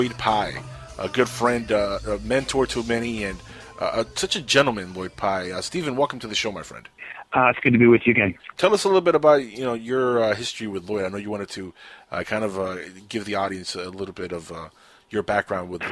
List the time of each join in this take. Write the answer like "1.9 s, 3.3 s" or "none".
3.1 s